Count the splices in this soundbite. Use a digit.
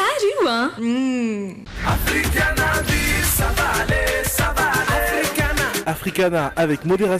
1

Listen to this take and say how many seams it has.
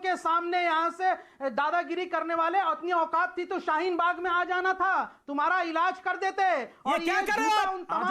0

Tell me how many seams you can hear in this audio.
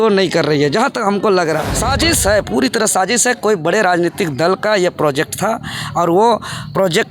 1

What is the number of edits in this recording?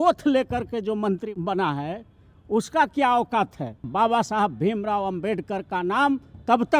2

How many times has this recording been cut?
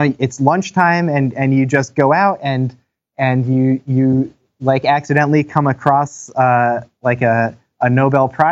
0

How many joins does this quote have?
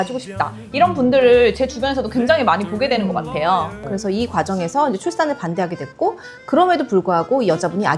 1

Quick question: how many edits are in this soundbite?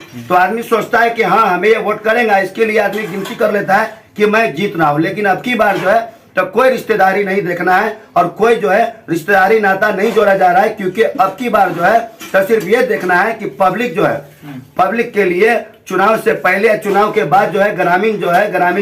0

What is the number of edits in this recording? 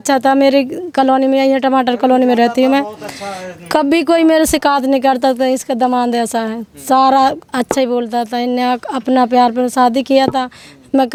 0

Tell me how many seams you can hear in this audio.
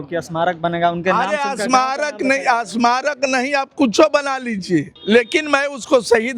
1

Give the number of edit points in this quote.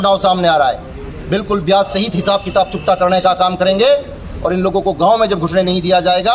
0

